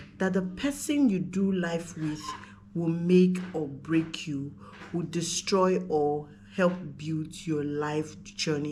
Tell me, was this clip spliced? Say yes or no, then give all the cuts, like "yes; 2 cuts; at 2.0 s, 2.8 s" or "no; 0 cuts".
no; 0 cuts